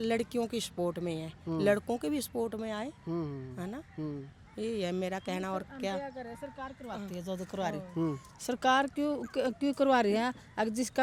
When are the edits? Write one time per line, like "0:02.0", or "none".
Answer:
none